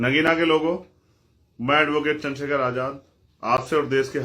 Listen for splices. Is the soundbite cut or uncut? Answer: uncut